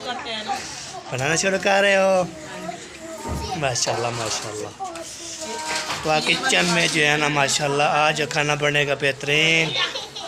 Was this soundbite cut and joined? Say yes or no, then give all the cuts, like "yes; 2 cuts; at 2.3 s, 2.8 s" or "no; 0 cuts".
no; 0 cuts